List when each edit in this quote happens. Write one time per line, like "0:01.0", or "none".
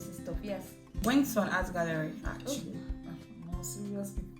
0:01.0